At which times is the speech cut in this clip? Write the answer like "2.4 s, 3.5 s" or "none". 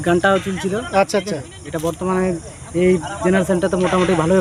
none